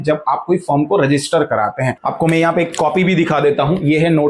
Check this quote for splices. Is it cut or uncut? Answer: cut